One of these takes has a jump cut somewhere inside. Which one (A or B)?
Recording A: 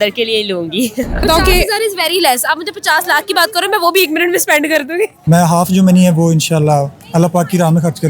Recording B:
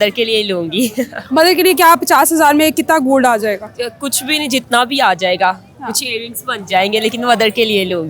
A